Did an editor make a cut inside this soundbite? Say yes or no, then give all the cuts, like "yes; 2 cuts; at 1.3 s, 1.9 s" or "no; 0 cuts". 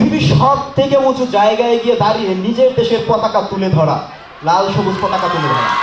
no; 0 cuts